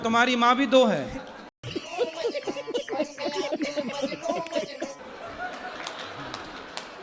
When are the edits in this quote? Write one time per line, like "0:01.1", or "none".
none